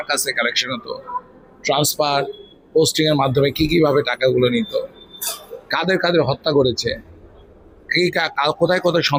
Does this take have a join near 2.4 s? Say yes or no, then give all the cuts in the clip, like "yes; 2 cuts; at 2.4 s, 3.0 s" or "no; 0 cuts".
no; 0 cuts